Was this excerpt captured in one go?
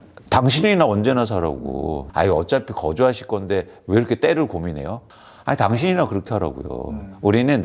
no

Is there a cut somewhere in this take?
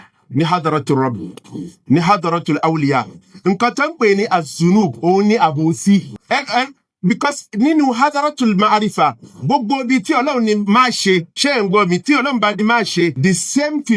yes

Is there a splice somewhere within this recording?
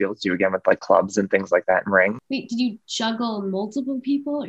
yes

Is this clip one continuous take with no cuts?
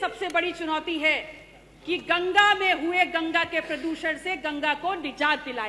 yes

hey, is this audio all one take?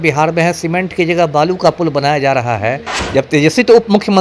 no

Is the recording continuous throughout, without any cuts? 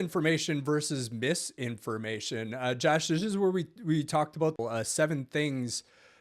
no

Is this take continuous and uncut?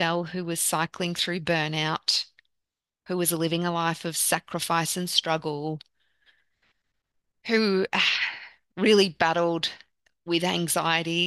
yes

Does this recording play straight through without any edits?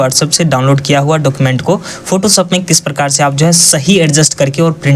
yes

